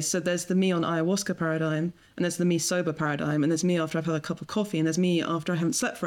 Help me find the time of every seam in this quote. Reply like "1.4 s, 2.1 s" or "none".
none